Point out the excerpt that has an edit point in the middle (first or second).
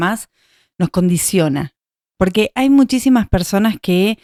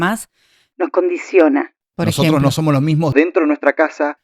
second